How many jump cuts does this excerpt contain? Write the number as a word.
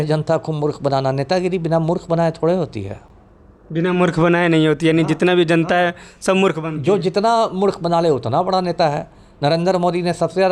zero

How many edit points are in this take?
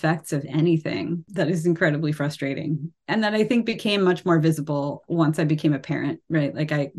three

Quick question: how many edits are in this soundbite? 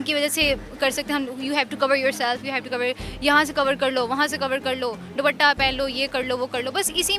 zero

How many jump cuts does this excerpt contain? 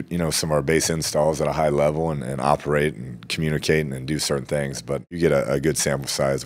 one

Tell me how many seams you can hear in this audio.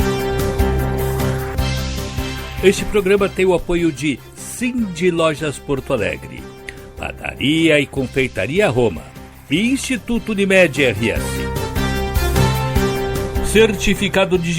four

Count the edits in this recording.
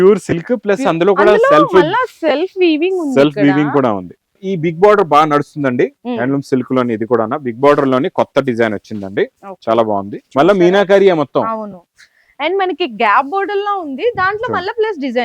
two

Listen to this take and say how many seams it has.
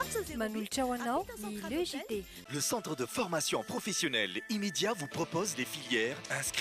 one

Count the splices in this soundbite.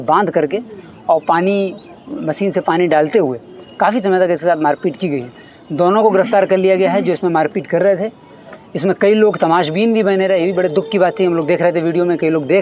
zero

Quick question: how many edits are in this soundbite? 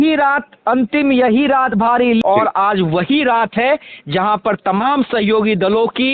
one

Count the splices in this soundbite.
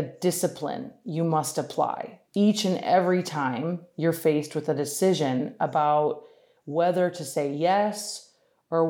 one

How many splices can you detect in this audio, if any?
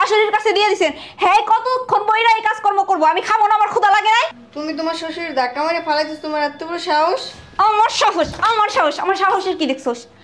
one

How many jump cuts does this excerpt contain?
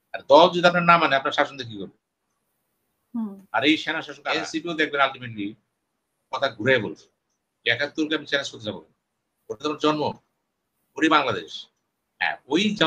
one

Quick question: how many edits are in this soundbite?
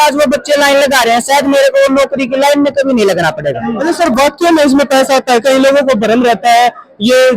one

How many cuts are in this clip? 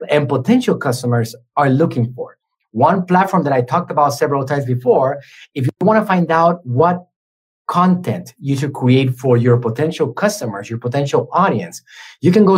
zero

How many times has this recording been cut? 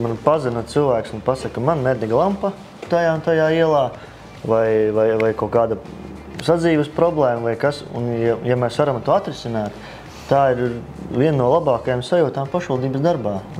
zero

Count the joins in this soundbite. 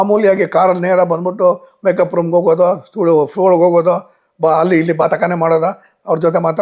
zero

